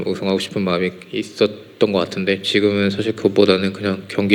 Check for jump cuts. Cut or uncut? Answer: uncut